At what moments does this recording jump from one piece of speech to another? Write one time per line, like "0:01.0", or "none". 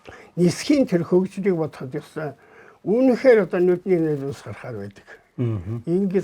none